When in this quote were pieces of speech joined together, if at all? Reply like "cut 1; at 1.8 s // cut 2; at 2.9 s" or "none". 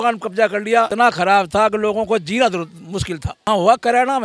cut 1; at 0.9 s // cut 2; at 3.5 s